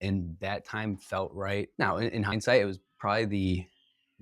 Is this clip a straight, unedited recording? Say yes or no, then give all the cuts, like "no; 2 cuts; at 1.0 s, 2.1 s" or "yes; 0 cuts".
no; 1 cut; at 1.7 s